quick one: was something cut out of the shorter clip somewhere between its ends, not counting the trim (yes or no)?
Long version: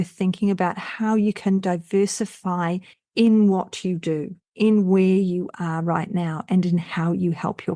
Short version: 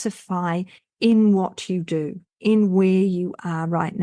no